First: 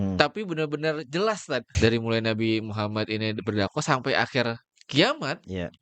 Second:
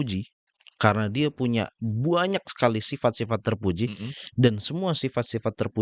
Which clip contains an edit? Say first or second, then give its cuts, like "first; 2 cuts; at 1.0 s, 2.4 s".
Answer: first; 1 cut; at 1.7 s